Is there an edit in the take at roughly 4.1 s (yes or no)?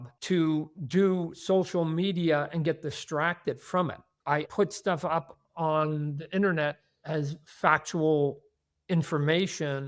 yes